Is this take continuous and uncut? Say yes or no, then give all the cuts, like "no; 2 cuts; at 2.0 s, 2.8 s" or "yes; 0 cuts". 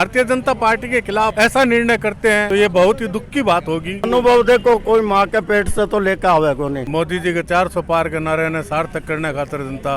no; 4 cuts; at 1.3 s, 2.4 s, 4.1 s, 6.8 s